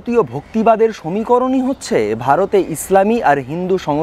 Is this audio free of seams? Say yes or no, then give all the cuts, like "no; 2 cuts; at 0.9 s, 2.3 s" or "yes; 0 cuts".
yes; 0 cuts